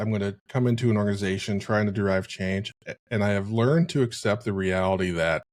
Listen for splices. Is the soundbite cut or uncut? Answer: uncut